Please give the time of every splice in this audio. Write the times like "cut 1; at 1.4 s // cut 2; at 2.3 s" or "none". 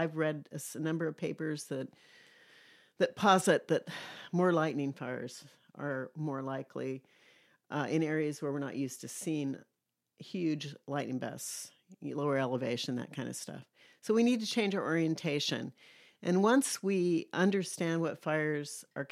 none